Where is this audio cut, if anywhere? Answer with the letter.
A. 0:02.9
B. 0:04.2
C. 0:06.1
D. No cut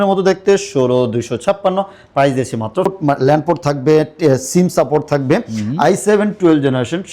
A